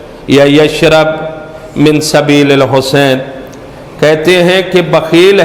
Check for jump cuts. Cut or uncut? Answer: uncut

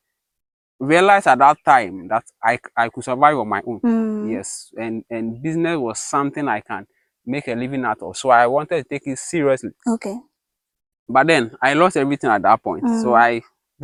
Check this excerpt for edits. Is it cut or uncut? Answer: uncut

